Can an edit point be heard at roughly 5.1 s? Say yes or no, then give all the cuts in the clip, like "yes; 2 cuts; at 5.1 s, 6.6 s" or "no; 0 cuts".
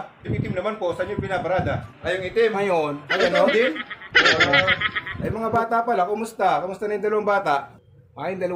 yes; 1 cut; at 5.1 s